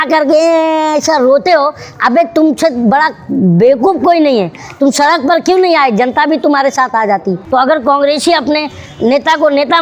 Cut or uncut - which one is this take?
cut